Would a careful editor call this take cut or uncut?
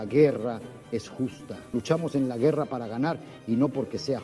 cut